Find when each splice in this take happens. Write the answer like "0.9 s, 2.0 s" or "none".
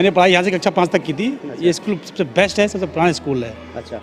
1.5 s